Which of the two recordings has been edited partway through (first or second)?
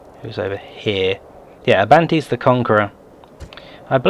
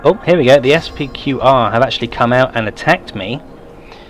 second